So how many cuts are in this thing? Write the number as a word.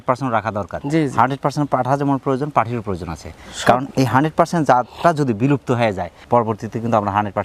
zero